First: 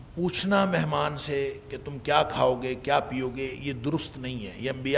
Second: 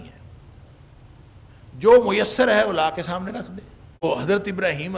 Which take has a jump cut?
second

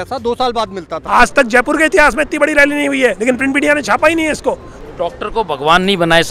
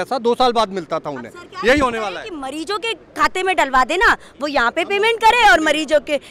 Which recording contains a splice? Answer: first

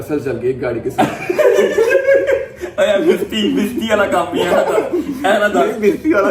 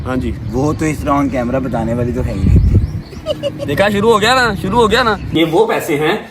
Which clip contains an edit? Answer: second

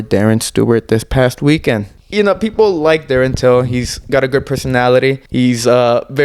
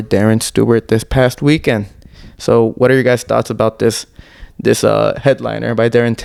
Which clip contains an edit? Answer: first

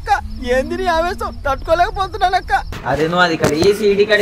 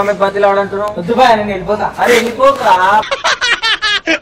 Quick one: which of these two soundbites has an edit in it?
first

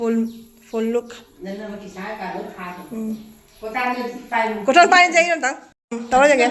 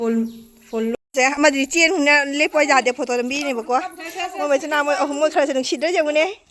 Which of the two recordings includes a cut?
second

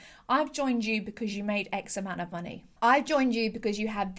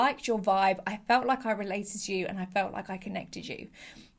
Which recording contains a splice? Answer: first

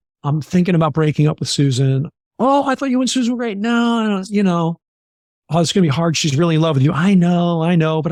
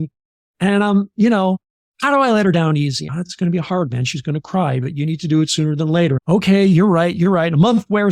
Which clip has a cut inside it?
second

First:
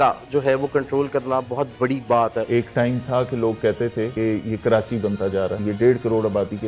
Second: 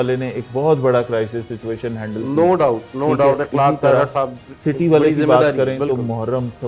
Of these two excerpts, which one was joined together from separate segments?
first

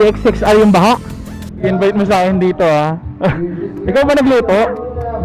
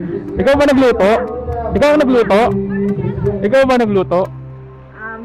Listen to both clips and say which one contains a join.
first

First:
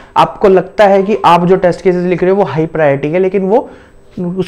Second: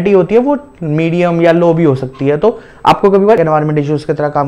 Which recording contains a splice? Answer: second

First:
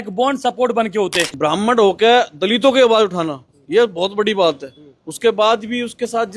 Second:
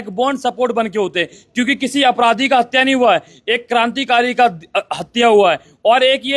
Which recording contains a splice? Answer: first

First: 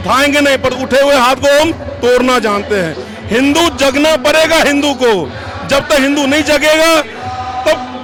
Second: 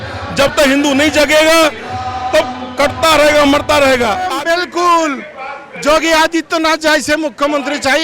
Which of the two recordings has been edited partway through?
second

